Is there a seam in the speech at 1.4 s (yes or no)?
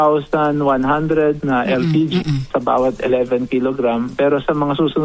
yes